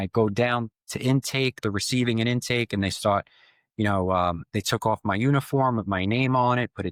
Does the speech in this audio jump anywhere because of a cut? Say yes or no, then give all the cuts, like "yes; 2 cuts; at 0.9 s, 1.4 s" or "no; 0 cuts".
no; 0 cuts